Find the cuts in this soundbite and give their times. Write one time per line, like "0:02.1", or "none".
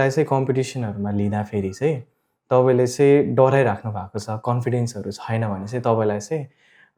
none